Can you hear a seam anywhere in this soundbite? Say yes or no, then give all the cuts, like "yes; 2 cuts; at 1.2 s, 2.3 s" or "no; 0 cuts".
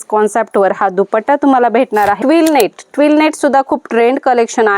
yes; 1 cut; at 2.2 s